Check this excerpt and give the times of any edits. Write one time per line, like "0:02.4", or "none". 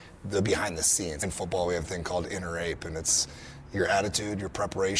0:01.2